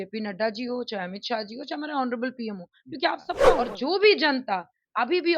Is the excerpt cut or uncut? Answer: cut